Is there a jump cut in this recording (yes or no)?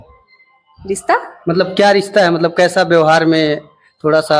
no